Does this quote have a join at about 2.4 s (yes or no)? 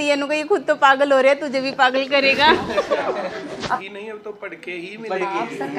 no